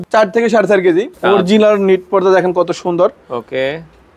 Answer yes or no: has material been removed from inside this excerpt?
yes